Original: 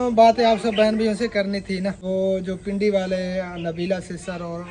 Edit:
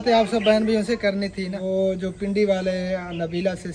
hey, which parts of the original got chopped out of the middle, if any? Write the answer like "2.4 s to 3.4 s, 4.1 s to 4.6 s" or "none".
1.9 s to 2.0 s